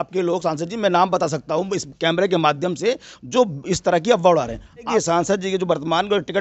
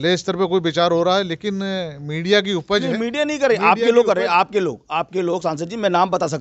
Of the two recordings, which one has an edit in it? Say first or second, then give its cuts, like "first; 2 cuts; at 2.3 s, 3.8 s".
first; 1 cut; at 4.9 s